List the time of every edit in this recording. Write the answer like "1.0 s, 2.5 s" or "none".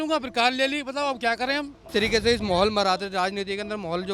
1.9 s